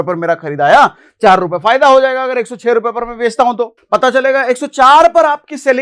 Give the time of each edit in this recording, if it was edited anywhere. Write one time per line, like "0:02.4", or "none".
0:03.8